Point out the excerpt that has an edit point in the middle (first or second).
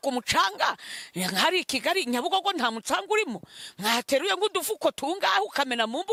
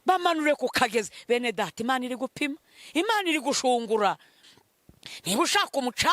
second